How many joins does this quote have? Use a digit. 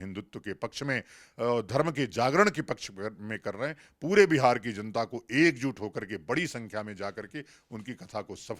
0